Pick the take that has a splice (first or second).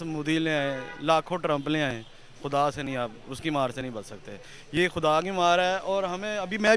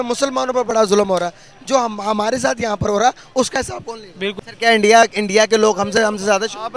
second